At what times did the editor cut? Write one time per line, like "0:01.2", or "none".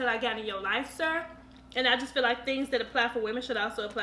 0:01.3